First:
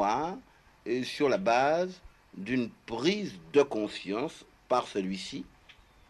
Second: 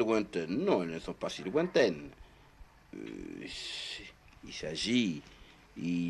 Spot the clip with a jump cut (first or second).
first